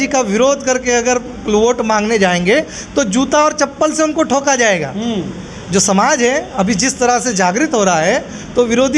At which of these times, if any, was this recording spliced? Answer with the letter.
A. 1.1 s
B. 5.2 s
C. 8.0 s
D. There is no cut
D